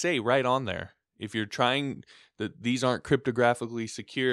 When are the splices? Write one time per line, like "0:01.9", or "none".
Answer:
none